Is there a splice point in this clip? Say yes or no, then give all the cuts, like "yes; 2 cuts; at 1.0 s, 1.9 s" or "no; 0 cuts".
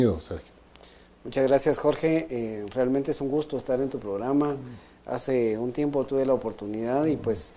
yes; 1 cut; at 2.5 s